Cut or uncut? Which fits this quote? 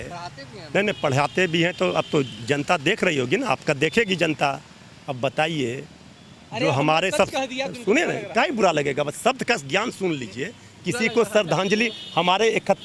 uncut